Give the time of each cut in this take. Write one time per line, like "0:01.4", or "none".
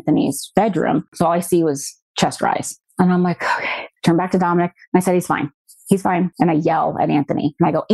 0:01.1